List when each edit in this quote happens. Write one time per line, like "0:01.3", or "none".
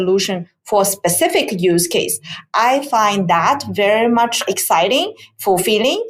0:04.5